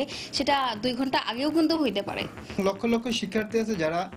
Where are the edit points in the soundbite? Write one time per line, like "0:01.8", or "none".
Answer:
0:02.6